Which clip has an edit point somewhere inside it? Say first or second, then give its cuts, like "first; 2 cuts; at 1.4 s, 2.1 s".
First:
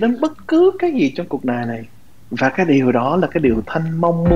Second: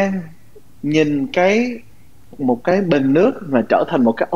second; 1 cut; at 2.4 s